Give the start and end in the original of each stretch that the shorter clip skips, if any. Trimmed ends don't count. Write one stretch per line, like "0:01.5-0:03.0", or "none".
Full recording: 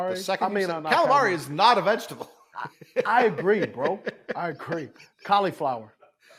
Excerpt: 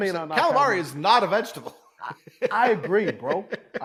none